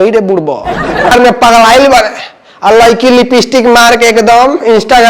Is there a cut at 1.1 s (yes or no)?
yes